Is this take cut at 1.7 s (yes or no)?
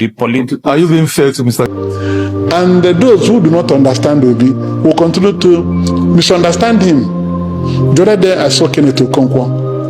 yes